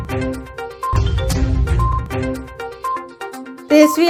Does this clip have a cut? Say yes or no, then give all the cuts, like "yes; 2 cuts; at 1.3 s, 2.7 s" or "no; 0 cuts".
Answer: no; 0 cuts